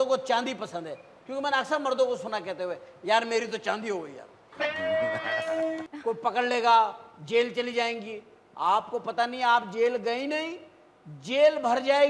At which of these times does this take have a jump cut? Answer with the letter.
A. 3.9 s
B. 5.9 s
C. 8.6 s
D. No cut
B